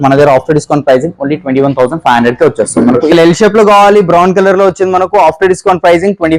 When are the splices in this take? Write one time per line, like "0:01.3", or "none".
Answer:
0:03.1